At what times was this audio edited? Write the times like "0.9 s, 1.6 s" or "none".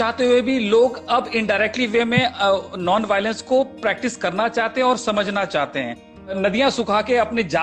6.4 s

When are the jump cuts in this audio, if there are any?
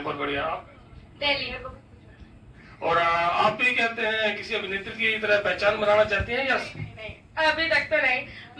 5.8 s

